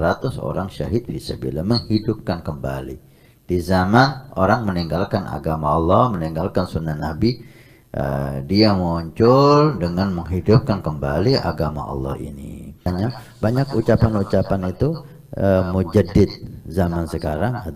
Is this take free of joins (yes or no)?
no